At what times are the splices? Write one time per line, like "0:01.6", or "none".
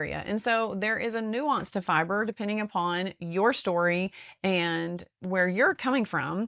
none